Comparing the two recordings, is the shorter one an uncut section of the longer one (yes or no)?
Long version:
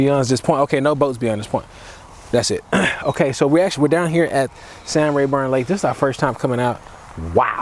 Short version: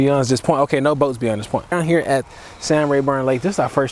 no